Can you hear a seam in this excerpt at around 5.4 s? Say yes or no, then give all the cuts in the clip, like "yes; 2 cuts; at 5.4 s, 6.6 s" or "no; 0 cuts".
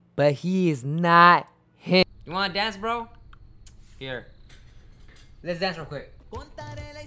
no; 1 cut; at 2.1 s